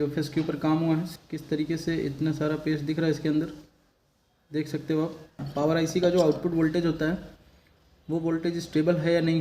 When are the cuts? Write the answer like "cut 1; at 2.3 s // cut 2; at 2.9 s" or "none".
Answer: cut 1; at 1.1 s // cut 2; at 5.4 s